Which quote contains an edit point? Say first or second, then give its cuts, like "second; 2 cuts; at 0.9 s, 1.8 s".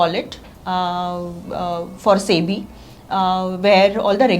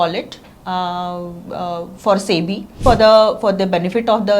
second; 1 cut; at 2.7 s